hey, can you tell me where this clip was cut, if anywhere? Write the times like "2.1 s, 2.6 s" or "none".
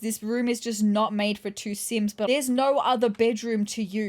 2.3 s